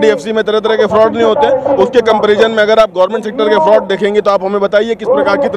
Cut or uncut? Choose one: uncut